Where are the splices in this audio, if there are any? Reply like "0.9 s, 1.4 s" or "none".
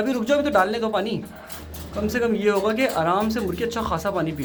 none